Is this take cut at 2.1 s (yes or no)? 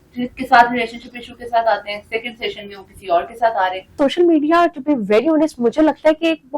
no